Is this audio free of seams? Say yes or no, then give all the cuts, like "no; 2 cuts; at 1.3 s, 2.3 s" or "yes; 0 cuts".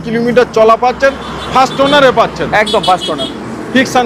yes; 0 cuts